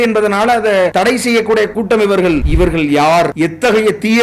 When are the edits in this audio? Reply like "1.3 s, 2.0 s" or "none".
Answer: 0.9 s, 2.5 s, 3.3 s